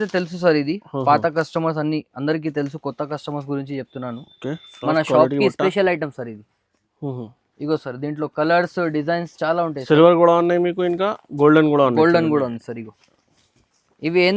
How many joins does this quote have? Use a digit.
0